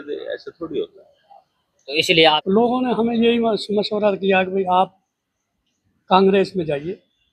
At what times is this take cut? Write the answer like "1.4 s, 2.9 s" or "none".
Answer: 2.4 s